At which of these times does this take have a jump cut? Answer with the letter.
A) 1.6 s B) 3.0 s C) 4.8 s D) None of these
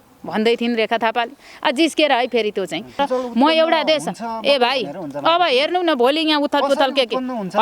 B